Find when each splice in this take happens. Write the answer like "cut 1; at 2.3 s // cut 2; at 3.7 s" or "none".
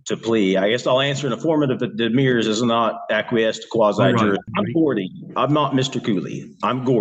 cut 1; at 4.5 s